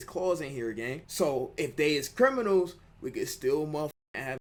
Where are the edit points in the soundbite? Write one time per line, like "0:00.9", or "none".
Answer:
none